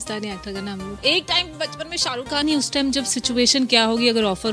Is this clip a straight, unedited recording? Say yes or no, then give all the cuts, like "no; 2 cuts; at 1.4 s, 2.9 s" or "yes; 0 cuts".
no; 2 cuts; at 1.0 s, 2.4 s